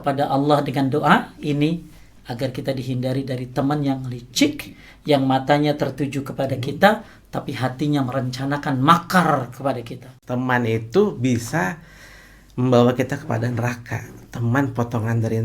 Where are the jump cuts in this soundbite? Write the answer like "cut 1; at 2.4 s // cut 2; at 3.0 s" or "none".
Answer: cut 1; at 10.1 s